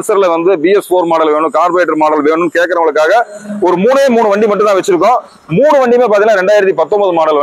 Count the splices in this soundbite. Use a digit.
0